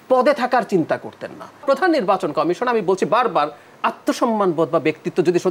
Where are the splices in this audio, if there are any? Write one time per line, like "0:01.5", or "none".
0:01.6